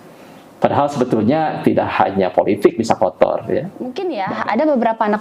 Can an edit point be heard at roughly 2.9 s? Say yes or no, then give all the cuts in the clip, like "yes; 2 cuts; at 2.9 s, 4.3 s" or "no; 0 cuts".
no; 1 cut; at 4.1 s